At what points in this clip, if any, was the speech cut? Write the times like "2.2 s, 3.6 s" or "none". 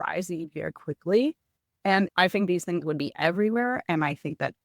2.1 s